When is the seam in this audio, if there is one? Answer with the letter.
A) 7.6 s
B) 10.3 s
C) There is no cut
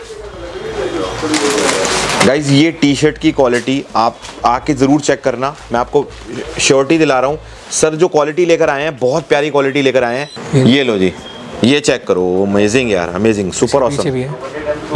B